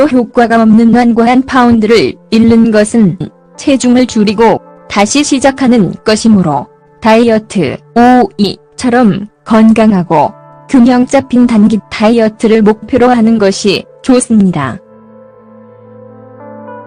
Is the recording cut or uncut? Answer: uncut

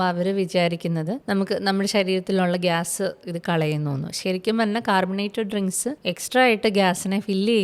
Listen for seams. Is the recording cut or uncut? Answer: cut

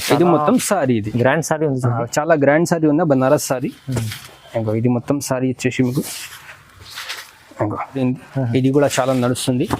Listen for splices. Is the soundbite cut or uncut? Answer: cut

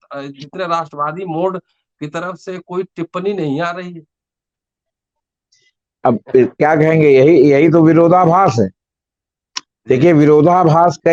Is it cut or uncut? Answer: uncut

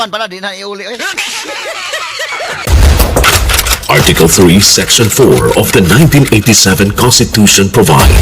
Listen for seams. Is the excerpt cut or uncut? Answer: cut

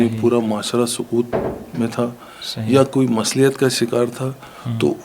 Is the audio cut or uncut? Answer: uncut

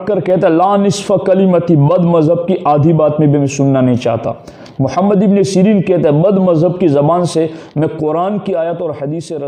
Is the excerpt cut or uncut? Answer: uncut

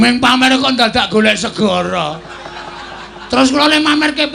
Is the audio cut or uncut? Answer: uncut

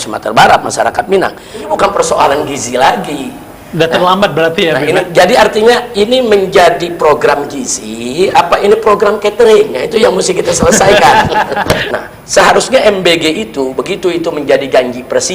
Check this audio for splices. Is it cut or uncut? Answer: cut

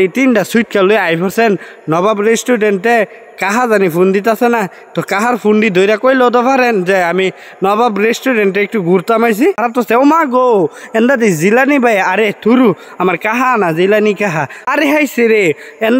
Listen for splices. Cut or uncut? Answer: cut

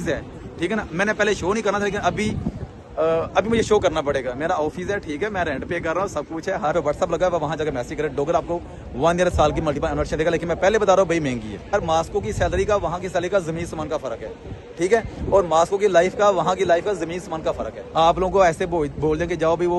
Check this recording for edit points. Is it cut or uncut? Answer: cut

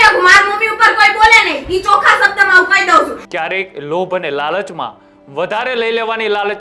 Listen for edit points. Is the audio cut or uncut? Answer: cut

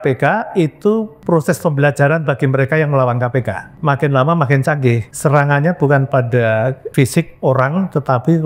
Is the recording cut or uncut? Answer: cut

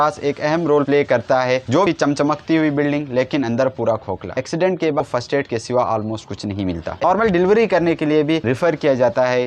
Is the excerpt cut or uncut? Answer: cut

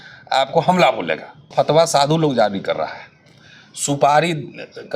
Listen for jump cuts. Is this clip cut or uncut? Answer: cut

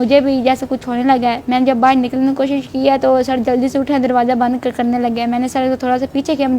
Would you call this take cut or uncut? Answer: cut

